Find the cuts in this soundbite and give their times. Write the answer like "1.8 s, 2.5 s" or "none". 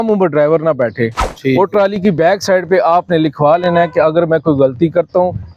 none